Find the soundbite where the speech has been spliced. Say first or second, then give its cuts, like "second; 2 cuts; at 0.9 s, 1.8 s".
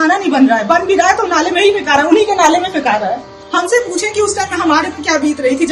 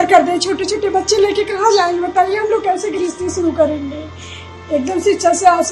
first; 1 cut; at 3.3 s